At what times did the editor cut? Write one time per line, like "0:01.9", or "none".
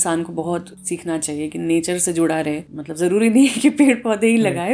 none

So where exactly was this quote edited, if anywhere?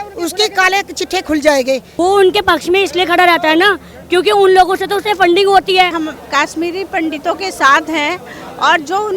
0:01.9
0:05.9

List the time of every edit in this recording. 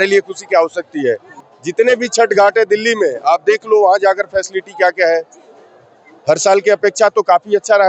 0:01.3

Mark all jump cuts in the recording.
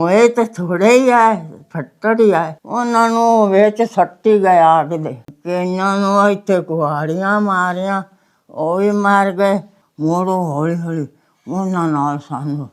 0:05.3
0:09.9

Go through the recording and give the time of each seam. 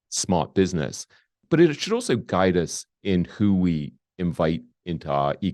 0:01.4

